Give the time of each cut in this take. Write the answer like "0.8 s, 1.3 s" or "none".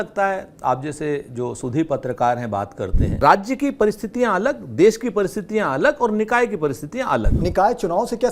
3.0 s, 7.3 s